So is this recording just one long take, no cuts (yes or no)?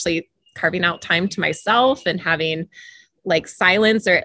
yes